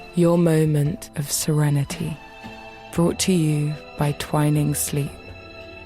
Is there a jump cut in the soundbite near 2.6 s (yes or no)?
no